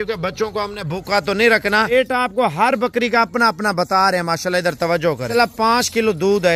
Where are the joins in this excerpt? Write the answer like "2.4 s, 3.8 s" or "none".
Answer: 1.9 s, 5.3 s